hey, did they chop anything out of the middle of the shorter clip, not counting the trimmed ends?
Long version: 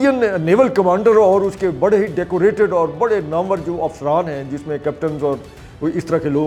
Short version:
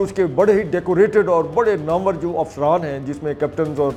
no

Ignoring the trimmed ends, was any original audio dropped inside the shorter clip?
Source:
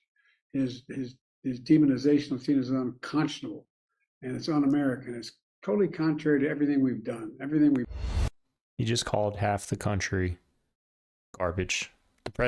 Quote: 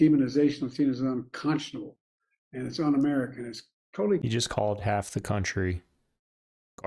yes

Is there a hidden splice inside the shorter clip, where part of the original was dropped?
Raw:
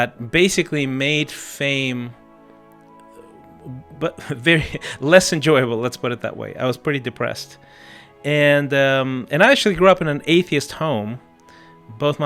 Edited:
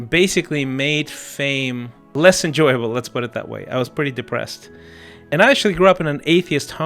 yes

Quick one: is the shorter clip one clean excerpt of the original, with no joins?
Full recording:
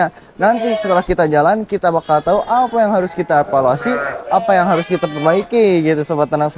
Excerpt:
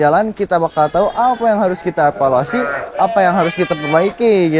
yes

